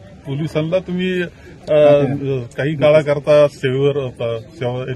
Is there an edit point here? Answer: no; 0 cuts

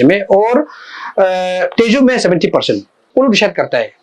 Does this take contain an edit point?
yes; 1 cut; at 3.1 s

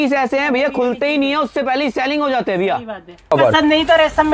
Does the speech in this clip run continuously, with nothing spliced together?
no; 1 cut; at 3.3 s

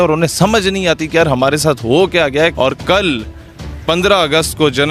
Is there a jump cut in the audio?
yes; 1 cut; at 2.5 s

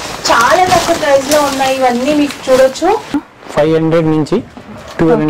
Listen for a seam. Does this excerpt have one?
yes; 1 cut; at 3.3 s

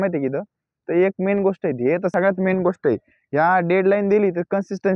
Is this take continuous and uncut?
no; 1 cut; at 2.1 s

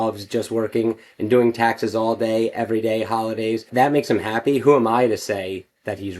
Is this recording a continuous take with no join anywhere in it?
no; 1 cut; at 3.7 s

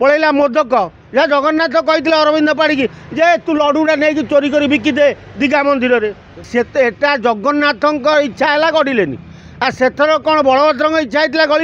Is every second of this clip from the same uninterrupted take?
no; 1 cut; at 6.5 s

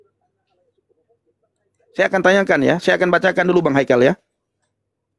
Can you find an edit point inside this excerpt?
no; 0 cuts

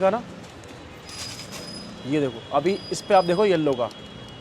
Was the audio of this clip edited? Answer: no; 0 cuts

